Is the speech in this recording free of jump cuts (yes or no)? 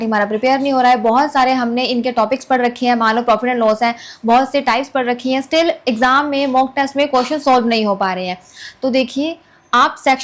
yes